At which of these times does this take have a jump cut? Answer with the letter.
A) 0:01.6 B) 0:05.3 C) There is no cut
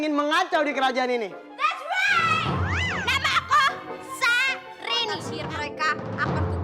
B